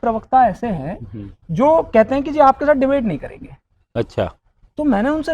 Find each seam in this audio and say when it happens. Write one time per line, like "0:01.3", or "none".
none